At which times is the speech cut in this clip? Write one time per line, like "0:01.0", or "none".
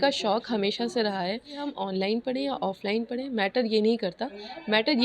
0:01.7

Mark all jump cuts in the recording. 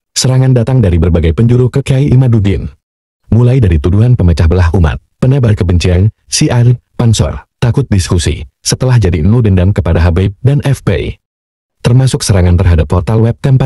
none

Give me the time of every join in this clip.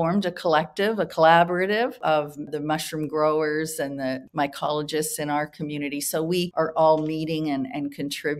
0:02.2
0:04.2
0:06.5

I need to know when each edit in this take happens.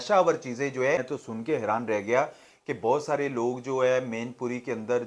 0:00.9

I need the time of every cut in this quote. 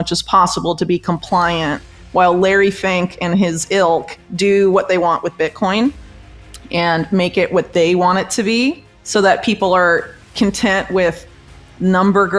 0:04.2

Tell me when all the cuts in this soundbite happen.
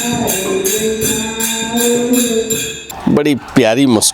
0:02.8

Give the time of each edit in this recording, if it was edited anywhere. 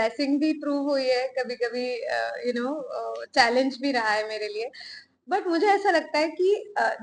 none

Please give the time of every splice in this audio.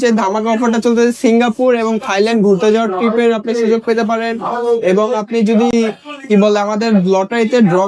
none

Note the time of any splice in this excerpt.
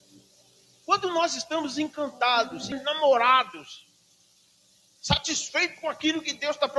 0:02.7

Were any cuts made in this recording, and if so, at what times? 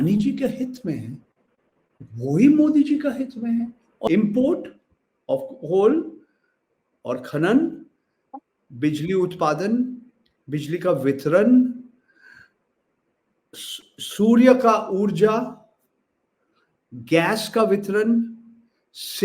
0:03.9

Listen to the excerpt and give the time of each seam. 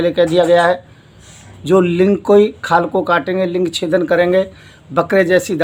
none

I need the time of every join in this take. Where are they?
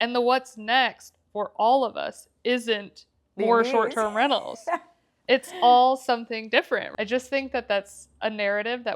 0:06.9

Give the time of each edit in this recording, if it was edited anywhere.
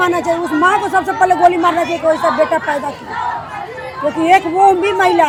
none

